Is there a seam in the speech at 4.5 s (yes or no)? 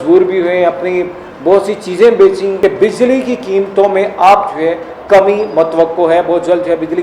no